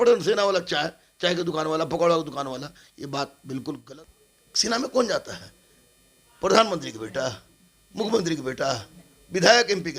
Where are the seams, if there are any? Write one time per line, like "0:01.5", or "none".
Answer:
0:03.8